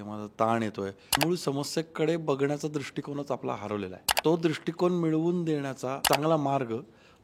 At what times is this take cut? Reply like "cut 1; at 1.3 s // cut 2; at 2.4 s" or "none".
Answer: cut 1; at 1.2 s // cut 2; at 4.1 s // cut 3; at 6.0 s

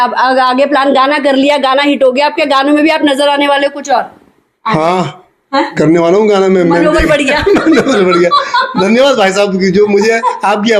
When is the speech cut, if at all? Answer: none

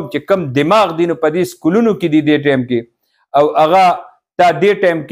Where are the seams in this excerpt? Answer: none

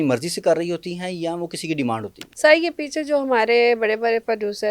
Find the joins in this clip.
cut 1; at 2.2 s

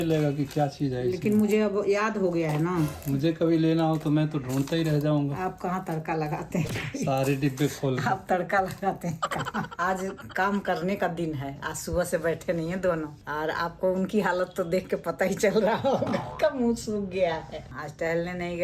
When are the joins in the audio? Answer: cut 1; at 2.9 s // cut 2; at 9.7 s // cut 3; at 17.6 s

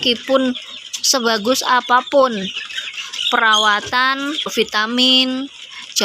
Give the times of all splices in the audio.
cut 1; at 4.5 s

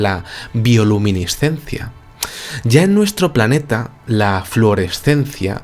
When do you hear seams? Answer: cut 1; at 1.7 s

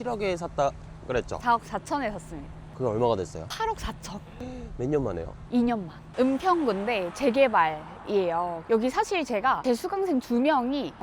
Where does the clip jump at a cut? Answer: cut 1; at 6.0 s

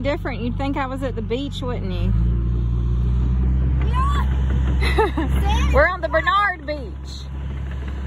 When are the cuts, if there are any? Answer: none

